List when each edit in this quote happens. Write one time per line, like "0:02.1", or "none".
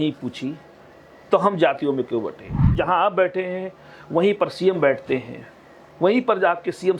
0:02.7